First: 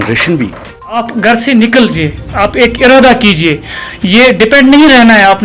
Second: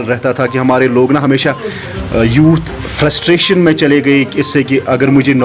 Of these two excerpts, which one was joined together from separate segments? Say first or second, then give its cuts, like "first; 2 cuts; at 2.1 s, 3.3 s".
first; 1 cut; at 1.0 s